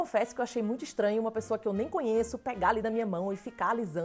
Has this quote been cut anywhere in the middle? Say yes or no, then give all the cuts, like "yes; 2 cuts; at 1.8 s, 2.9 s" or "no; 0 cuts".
no; 0 cuts